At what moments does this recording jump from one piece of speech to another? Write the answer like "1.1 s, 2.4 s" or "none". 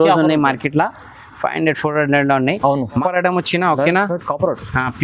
3.0 s